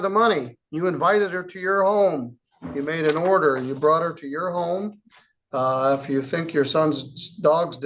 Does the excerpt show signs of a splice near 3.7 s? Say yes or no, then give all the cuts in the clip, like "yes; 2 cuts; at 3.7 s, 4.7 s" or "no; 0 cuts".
no; 1 cut; at 1.4 s